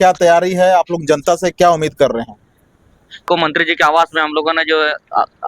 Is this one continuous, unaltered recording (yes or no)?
no